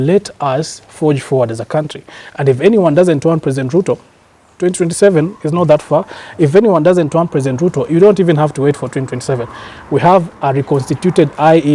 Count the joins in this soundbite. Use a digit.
0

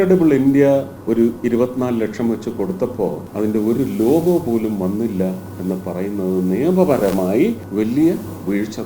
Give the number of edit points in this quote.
3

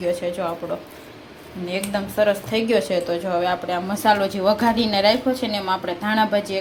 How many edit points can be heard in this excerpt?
0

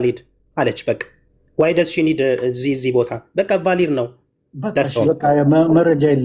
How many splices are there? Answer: 0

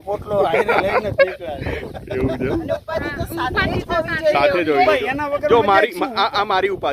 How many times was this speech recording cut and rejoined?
0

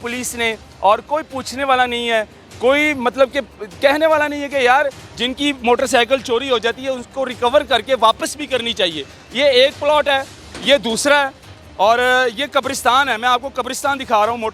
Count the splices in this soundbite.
0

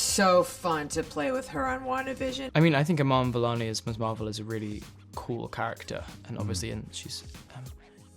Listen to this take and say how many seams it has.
1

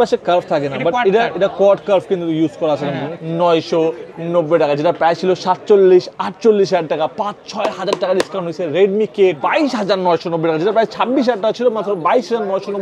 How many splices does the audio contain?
2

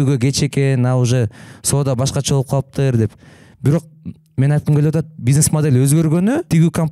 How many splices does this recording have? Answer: 0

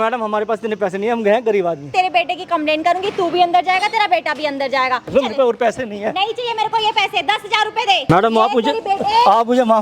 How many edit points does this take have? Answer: 3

